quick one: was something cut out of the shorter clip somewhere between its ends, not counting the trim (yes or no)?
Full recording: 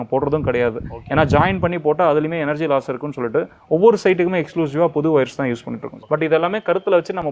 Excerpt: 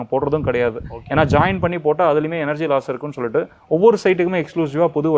no